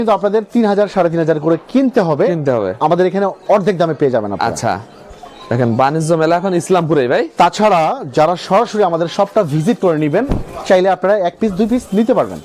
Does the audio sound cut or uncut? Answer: uncut